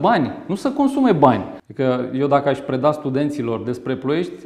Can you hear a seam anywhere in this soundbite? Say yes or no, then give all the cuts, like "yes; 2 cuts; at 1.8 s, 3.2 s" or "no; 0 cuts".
yes; 1 cut; at 1.5 s